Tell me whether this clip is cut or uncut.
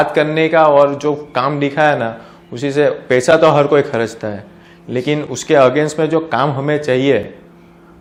uncut